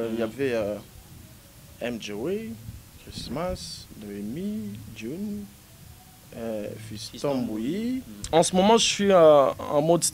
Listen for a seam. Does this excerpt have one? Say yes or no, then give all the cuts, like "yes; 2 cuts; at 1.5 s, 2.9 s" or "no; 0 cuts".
yes; 1 cut; at 8.1 s